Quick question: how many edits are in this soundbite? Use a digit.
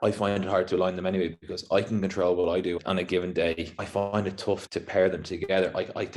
0